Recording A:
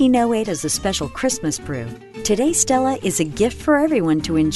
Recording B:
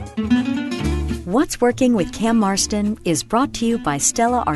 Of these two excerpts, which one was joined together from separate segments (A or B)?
B